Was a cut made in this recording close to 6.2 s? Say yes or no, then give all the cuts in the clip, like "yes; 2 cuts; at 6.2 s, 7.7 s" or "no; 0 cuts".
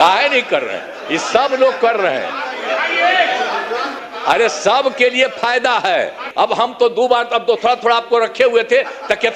yes; 2 cuts; at 3.9 s, 6.2 s